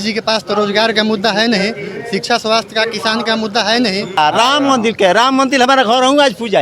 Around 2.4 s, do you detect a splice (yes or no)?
no